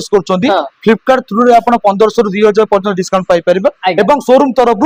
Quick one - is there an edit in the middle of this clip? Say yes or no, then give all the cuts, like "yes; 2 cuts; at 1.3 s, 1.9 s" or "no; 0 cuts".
no; 0 cuts